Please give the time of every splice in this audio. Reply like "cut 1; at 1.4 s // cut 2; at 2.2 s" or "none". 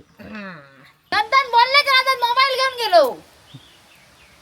cut 1; at 1.0 s

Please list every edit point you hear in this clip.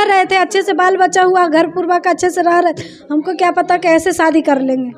none

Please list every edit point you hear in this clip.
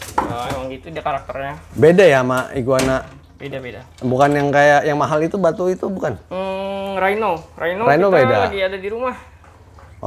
none

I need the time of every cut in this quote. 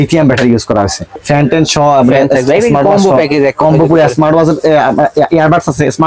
cut 1; at 1.1 s

